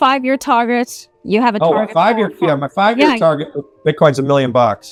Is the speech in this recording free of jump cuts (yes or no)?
yes